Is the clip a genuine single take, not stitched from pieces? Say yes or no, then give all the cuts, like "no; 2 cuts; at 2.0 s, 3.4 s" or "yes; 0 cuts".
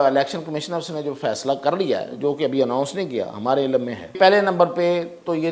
no; 1 cut; at 4.2 s